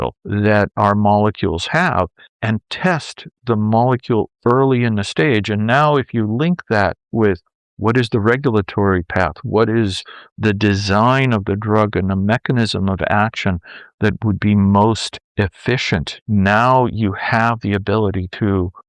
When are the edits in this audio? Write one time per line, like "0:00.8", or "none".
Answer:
0:16.1